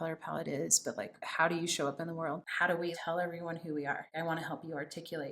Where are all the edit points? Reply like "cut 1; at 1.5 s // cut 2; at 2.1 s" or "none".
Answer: cut 1; at 1.2 s // cut 2; at 2.5 s // cut 3; at 4.1 s